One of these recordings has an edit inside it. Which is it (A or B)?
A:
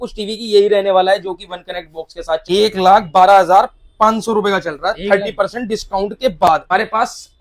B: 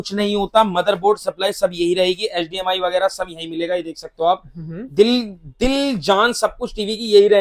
A